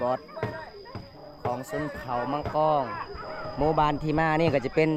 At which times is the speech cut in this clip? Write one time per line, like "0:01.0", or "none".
none